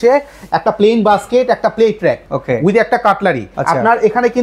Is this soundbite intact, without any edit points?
no; 2 cuts; at 2.3 s, 3.5 s

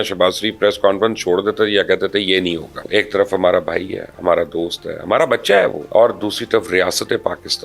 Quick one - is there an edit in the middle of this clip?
yes; 2 cuts; at 2.8 s, 5.8 s

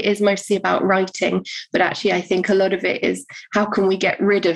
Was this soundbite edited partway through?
no; 0 cuts

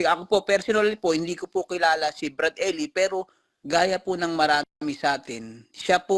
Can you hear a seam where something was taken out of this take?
no; 0 cuts

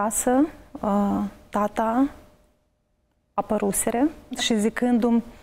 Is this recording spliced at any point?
yes; 1 cut; at 4.4 s

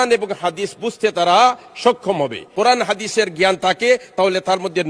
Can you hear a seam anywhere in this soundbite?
yes; 1 cut; at 2.4 s

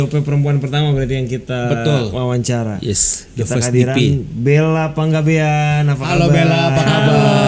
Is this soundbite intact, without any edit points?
yes; 0 cuts

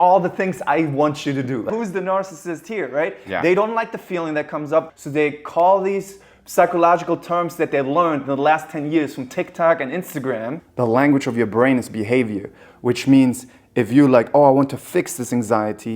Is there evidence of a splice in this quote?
yes; 3 cuts; at 1.7 s, 4.9 s, 10.6 s

